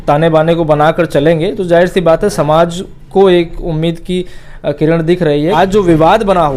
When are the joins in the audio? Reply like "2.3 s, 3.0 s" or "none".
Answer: 5.5 s